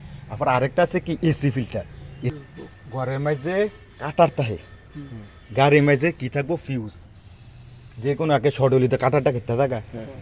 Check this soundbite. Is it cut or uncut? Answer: cut